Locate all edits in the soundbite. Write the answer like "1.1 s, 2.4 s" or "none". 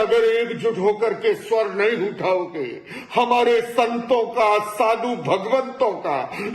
5.4 s